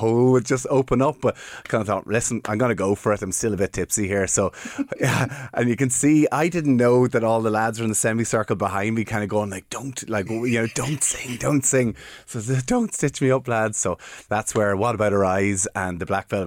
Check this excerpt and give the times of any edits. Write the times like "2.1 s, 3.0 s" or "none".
none